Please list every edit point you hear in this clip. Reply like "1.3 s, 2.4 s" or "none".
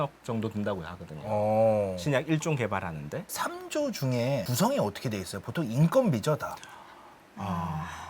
3.3 s